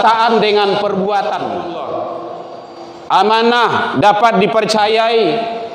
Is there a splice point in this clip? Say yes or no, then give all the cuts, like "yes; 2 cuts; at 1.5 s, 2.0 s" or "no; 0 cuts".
yes; 1 cut; at 1.6 s